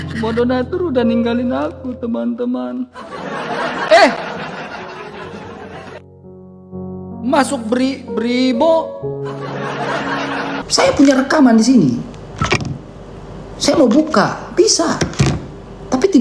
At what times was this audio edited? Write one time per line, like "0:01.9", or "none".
0:10.6